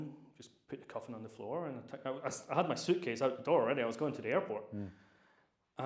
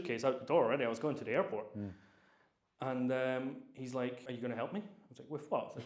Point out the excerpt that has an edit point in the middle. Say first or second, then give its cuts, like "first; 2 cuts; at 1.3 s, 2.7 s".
second; 1 cut; at 4.2 s